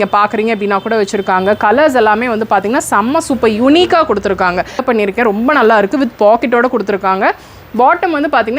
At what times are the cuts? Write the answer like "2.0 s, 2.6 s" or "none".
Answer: 4.8 s